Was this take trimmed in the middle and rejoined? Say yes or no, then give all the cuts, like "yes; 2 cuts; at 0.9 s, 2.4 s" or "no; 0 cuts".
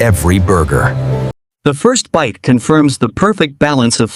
yes; 1 cut; at 1.4 s